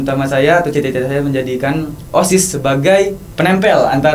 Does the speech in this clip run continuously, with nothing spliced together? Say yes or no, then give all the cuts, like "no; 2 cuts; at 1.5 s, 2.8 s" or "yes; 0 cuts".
no; 1 cut; at 3.2 s